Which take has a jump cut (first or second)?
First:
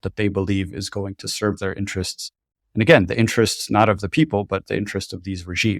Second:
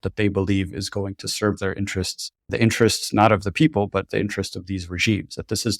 second